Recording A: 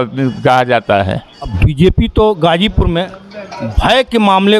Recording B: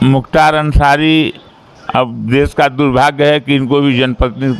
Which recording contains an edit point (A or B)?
A